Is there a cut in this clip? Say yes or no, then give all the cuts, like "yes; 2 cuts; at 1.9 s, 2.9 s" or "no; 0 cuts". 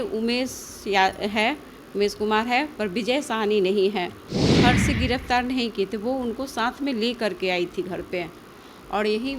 yes; 1 cut; at 4.5 s